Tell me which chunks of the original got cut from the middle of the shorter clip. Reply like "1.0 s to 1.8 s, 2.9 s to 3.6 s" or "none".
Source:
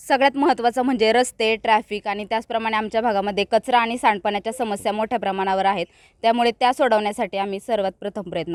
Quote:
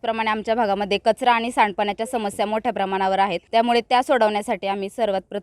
5.9 s to 6.1 s